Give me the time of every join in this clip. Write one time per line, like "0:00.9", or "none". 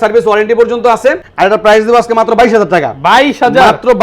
0:01.3